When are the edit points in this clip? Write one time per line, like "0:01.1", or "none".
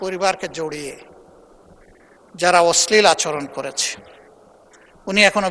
none